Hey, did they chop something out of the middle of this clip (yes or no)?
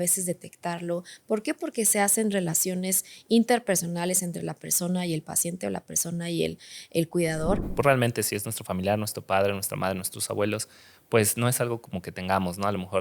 yes